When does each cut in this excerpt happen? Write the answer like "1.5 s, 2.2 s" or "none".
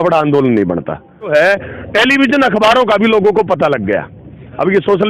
1.3 s